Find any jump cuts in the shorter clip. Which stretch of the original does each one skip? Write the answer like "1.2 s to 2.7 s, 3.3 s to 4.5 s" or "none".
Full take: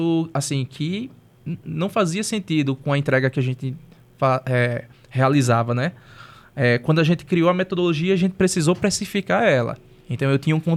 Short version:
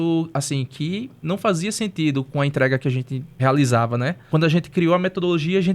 1.2 s to 1.7 s, 3.7 s to 5.0 s, 6.0 s to 6.8 s